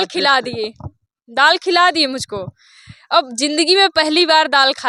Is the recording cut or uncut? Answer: uncut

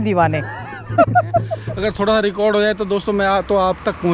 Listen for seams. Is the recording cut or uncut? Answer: cut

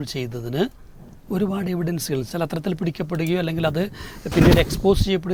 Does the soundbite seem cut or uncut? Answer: uncut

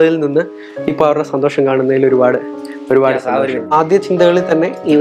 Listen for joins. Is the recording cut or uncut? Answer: cut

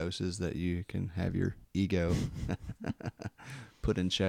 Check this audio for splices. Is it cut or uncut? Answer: cut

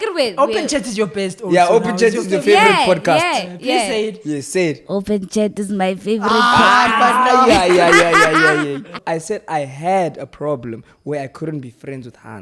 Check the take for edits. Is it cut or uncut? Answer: cut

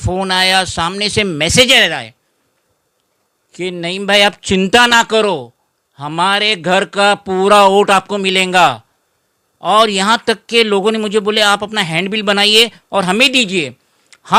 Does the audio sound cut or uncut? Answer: uncut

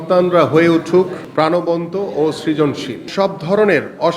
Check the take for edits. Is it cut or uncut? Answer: cut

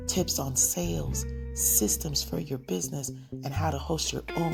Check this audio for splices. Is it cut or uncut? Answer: uncut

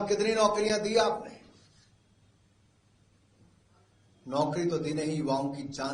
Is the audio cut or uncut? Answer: uncut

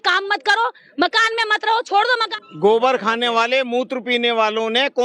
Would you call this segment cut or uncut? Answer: cut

